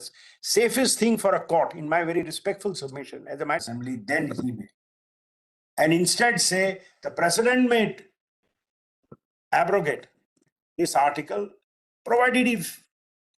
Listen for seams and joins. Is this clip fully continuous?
no; 1 cut; at 3.6 s

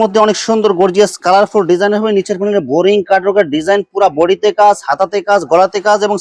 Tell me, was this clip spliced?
no; 0 cuts

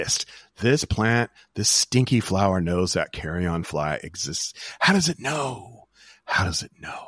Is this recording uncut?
yes; 0 cuts

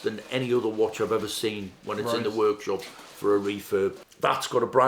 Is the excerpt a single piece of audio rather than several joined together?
yes; 0 cuts

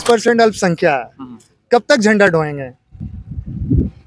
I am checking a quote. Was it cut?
no; 0 cuts

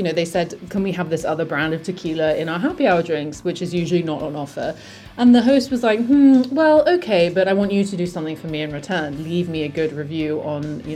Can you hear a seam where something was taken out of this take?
no; 0 cuts

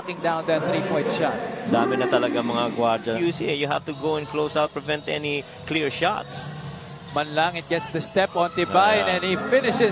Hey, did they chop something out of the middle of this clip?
no; 0 cuts

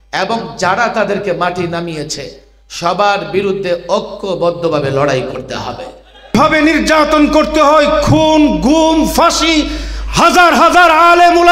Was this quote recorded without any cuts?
no; 1 cut; at 6.3 s

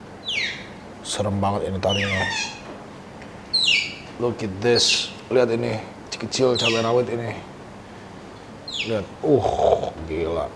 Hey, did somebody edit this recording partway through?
no; 0 cuts

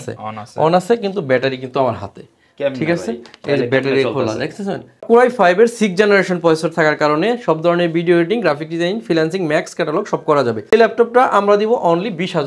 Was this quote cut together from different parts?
yes; 2 cuts; at 5.0 s, 10.7 s

